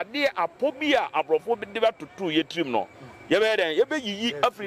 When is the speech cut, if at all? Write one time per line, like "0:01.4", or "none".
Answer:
none